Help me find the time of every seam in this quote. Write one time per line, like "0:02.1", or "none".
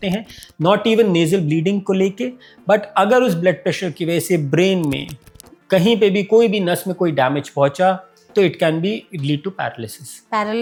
none